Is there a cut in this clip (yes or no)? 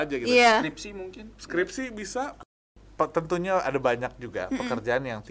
yes